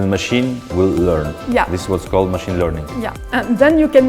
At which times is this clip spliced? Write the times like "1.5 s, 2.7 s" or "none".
3.2 s

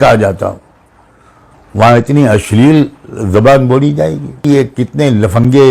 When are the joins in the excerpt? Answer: 4.4 s

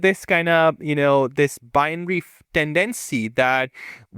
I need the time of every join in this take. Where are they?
none

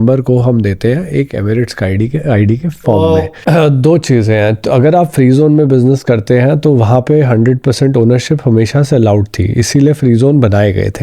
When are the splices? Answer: 3.4 s

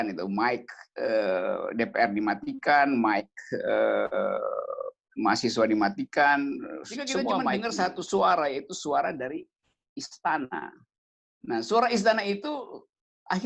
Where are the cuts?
7.6 s

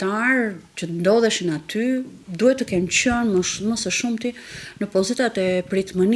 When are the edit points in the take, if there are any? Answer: 2.2 s

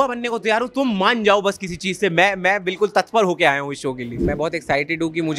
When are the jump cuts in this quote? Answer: 4.2 s

